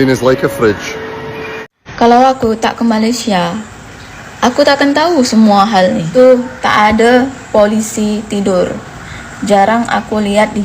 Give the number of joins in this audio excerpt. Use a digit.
2